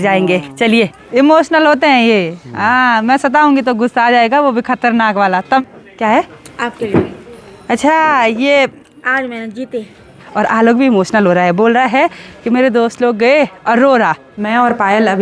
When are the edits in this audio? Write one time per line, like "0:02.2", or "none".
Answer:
0:01.0
0:05.6
0:10.2
0:14.3